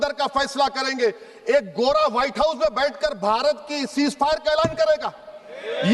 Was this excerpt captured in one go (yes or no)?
yes